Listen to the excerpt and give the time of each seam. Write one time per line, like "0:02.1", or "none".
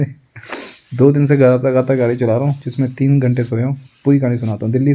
none